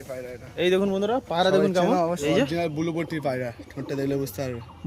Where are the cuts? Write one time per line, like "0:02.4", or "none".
0:02.2